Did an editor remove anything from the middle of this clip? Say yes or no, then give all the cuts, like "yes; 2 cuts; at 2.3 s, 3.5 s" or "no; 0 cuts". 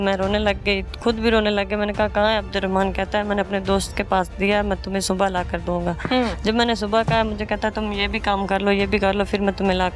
no; 0 cuts